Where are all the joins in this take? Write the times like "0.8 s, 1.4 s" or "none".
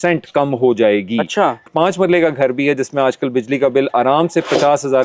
1.6 s